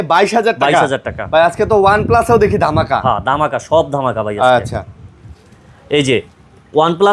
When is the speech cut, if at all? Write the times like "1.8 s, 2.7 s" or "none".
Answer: none

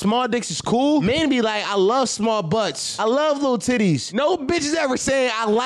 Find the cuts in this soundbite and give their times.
1.0 s, 2.8 s, 4.1 s

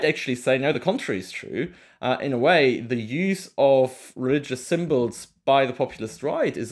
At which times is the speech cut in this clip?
none

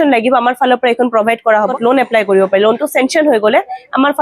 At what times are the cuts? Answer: 1.7 s

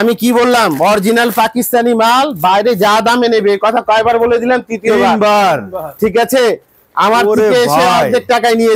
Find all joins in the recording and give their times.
none

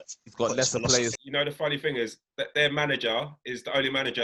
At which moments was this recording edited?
1.2 s

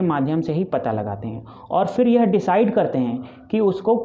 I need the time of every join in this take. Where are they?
none

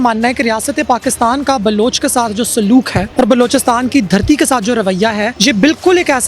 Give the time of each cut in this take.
3.0 s, 5.3 s

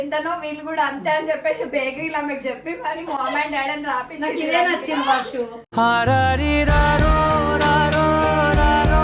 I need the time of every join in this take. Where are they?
none

